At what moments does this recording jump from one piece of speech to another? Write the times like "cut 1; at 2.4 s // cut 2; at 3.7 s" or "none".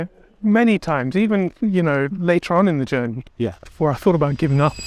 none